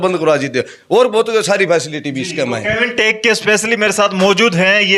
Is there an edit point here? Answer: no; 0 cuts

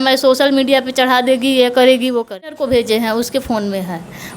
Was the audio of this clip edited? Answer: yes; 1 cut; at 2.6 s

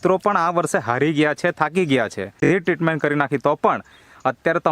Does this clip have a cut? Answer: yes; 1 cut; at 2.4 s

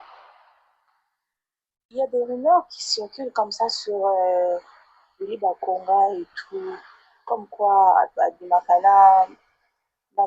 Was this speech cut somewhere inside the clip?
no; 0 cuts

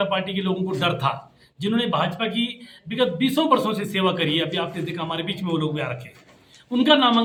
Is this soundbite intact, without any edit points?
yes; 0 cuts

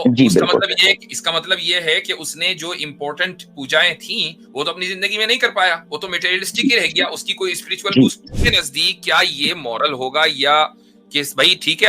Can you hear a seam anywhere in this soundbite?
yes; 1 cut; at 8.4 s

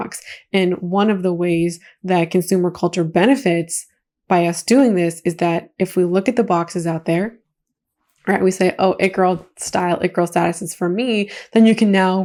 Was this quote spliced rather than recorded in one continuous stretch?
no; 0 cuts

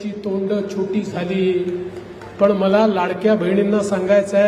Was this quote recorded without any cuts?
yes; 0 cuts

